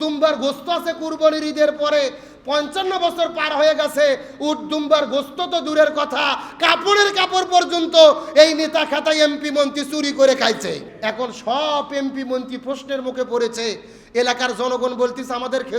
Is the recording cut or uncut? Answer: cut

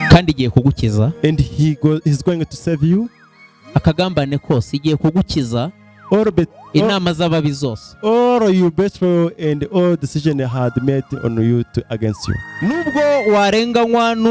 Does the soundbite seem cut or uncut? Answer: cut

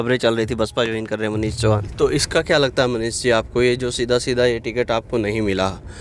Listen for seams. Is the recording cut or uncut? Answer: cut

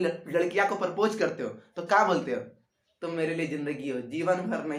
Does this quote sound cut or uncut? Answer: uncut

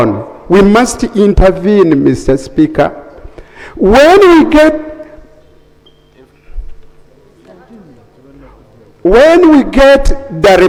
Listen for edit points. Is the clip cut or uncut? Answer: uncut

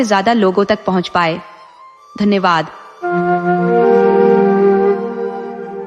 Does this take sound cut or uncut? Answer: cut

